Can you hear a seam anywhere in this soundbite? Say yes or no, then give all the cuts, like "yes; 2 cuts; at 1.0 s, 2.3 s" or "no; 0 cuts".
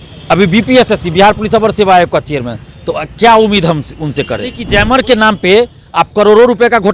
yes; 1 cut; at 4.6 s